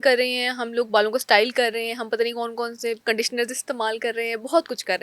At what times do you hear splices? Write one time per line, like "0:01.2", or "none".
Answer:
0:03.0